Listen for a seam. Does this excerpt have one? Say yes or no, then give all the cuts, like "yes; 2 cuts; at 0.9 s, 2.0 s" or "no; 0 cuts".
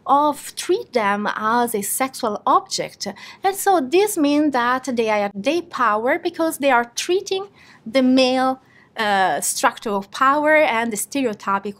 no; 0 cuts